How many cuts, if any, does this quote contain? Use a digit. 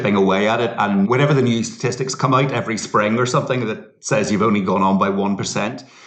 1